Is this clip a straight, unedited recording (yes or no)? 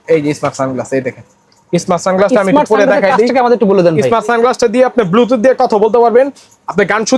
yes